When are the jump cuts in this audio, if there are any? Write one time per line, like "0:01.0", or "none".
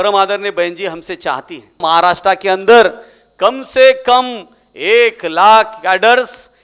0:01.8